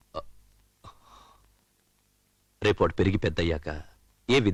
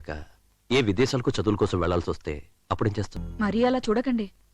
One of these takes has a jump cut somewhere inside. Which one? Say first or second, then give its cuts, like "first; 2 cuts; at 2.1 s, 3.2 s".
second; 1 cut; at 3.2 s